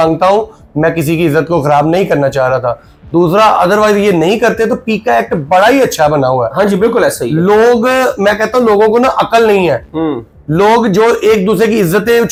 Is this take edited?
no; 0 cuts

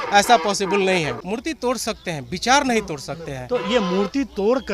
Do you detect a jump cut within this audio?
yes; 1 cut; at 1.2 s

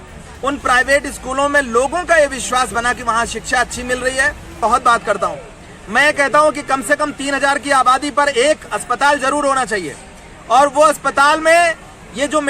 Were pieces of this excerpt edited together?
yes; 1 cut; at 4.5 s

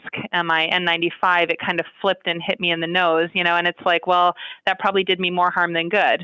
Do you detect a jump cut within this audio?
no; 0 cuts

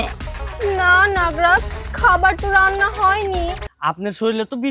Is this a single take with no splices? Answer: no; 1 cut; at 3.7 s

